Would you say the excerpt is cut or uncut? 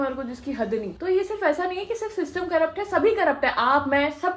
cut